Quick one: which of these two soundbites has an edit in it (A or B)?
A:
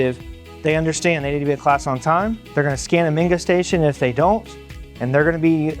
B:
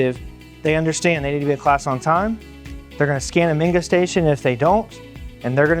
A